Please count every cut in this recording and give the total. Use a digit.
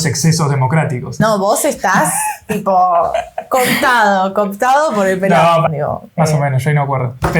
2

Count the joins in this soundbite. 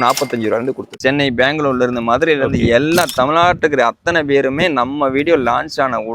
1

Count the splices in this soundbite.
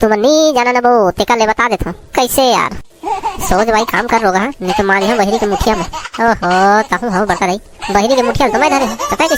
0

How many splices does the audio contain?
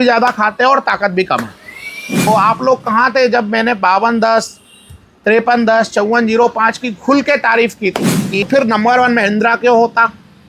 2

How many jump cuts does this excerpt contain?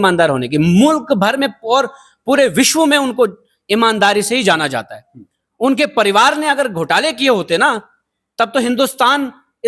0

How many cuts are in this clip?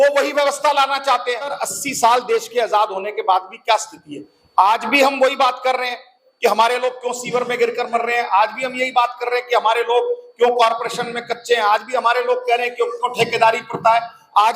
1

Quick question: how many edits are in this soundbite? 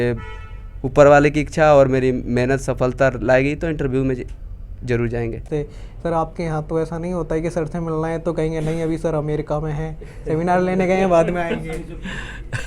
1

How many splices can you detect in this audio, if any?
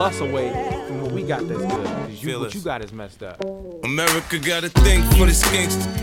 1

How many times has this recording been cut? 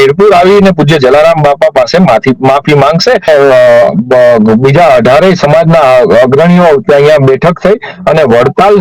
1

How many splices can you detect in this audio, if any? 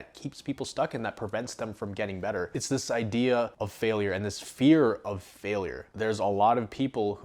2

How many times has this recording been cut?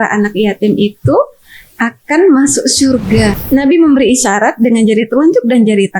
1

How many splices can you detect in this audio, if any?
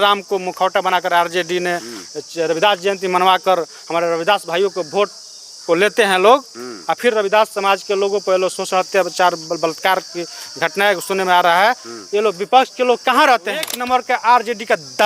1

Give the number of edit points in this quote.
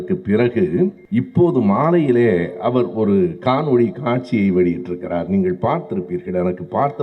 1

